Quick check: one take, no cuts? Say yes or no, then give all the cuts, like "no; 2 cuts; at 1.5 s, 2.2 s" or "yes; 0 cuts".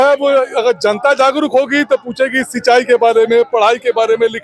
yes; 0 cuts